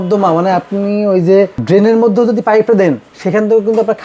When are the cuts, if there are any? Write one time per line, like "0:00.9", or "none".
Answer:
0:01.6
0:03.1